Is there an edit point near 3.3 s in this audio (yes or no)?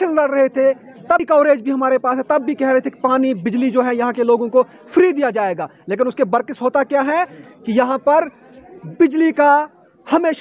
no